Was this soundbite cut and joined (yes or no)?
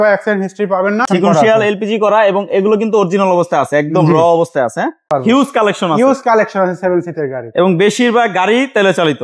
yes